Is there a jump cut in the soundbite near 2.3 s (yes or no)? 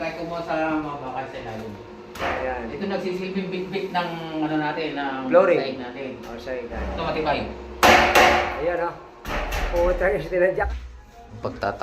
no